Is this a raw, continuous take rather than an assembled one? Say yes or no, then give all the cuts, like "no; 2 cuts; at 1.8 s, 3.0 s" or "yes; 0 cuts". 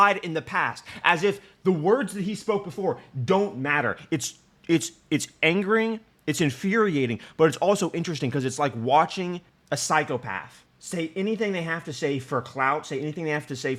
yes; 0 cuts